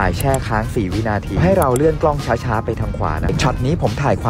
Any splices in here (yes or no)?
yes